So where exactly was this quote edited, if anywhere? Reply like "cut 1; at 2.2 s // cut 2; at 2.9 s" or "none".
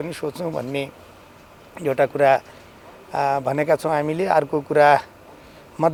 none